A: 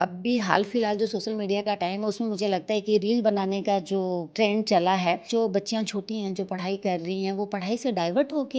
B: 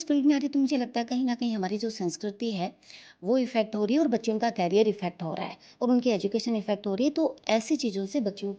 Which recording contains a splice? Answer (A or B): A